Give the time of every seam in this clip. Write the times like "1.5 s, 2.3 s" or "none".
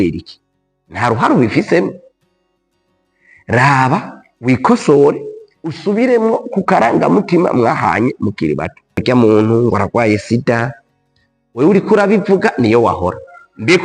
9.0 s